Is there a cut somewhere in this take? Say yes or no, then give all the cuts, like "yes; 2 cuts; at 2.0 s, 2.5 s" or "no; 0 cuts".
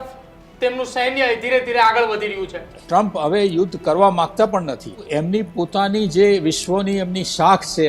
yes; 2 cuts; at 2.7 s, 5.0 s